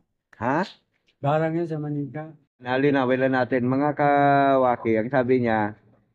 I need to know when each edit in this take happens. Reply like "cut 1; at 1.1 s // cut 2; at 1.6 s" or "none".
cut 1; at 2.7 s